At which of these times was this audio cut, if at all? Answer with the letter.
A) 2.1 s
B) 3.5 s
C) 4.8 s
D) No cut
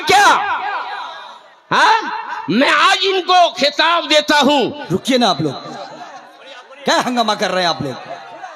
C